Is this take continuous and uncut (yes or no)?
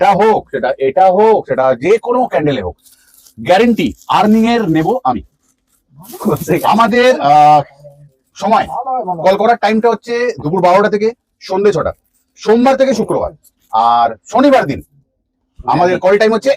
yes